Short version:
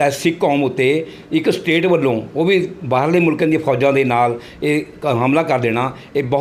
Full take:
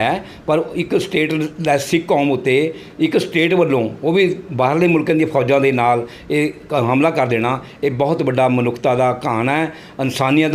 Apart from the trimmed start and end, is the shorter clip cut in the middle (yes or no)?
no